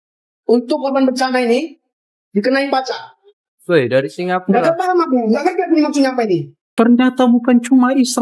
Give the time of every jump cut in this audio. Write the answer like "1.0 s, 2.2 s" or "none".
6.6 s